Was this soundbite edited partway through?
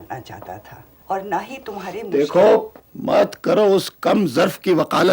yes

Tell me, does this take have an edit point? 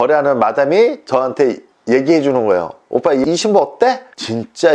no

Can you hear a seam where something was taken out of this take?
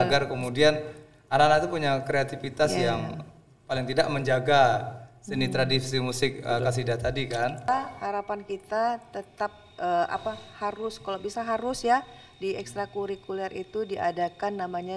yes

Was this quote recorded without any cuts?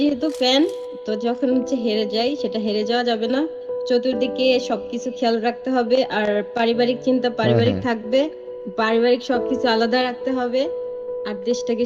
yes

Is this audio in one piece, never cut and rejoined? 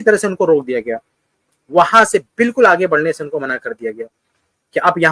yes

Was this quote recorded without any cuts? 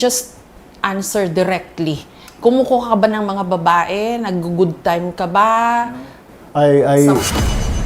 yes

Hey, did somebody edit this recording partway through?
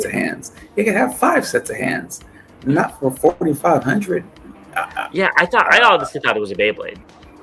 no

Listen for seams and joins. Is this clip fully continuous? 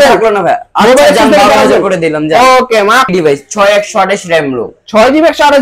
no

